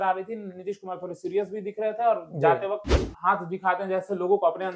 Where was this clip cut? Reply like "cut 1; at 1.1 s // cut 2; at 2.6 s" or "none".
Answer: none